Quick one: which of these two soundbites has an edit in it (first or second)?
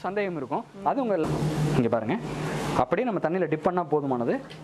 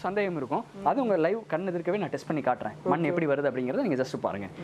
first